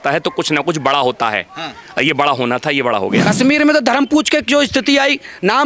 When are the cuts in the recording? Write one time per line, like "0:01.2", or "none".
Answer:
0:03.3